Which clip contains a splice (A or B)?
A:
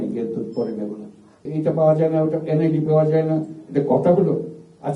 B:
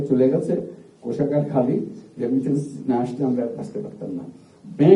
A